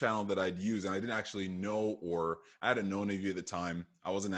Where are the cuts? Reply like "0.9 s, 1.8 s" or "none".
none